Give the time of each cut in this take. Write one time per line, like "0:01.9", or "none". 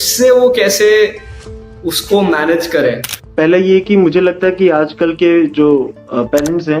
0:03.2